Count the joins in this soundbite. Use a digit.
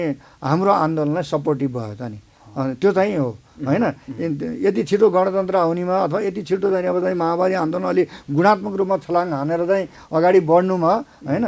0